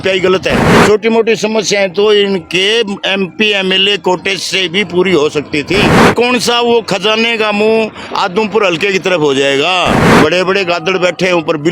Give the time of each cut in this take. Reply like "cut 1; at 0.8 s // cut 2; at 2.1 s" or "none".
cut 1; at 0.8 s // cut 2; at 6.0 s // cut 3; at 10.0 s